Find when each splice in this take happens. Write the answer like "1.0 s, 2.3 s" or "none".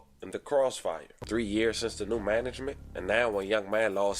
1.2 s